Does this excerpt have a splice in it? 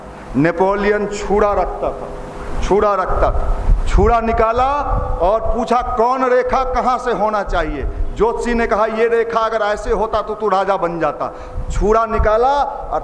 no; 0 cuts

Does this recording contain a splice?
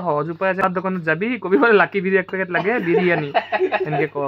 no; 0 cuts

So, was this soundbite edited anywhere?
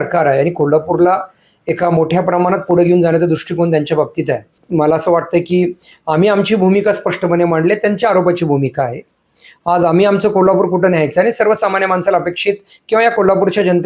yes; 1 cut; at 4.6 s

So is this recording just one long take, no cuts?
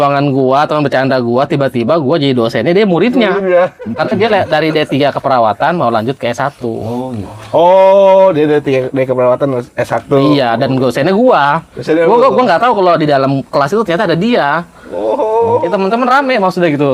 yes; 0 cuts

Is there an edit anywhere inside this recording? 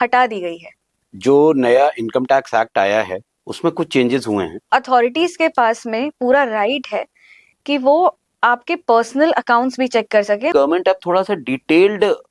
yes; 3 cuts; at 1.1 s, 4.7 s, 10.5 s

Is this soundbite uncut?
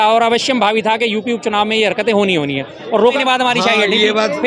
no; 1 cut; at 3.2 s

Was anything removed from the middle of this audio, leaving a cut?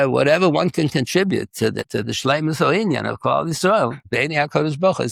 no; 0 cuts

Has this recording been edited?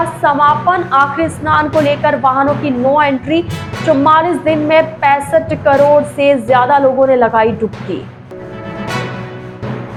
no; 0 cuts

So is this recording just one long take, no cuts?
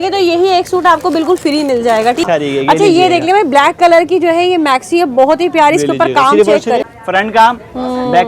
no; 2 cuts; at 2.3 s, 7.0 s

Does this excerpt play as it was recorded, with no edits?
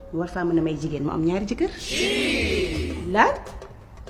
yes; 0 cuts

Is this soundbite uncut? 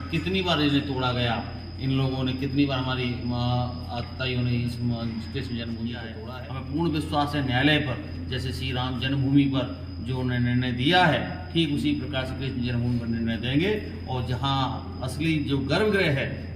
no; 1 cut; at 6.2 s

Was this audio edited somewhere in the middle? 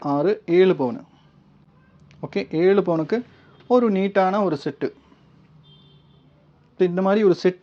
no; 0 cuts

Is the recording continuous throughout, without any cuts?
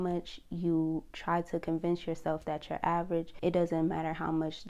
no; 1 cut; at 3.3 s

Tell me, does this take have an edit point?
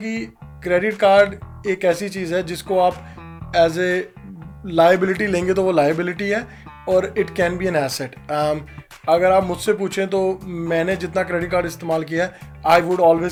no; 0 cuts

